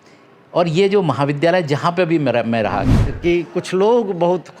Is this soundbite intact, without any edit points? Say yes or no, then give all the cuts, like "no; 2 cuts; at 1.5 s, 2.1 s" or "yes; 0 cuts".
no; 1 cut; at 2.9 s